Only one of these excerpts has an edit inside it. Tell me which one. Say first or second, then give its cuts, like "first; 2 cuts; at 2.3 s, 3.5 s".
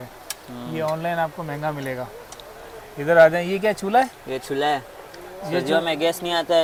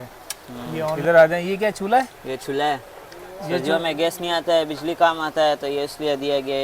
second; 1 cut; at 1.0 s